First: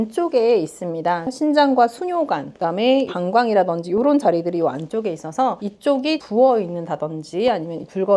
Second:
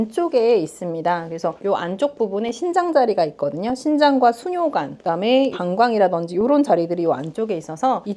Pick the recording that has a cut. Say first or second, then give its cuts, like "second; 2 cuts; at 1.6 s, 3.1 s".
first; 1 cut; at 1.3 s